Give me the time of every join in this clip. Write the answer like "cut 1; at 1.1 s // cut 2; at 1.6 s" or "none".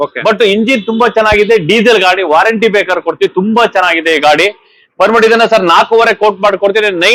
none